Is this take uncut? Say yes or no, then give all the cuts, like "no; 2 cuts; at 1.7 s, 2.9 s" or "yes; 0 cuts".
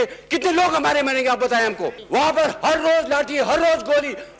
no; 1 cut; at 1.9 s